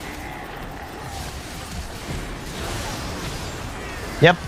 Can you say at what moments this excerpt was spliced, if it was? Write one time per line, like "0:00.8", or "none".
none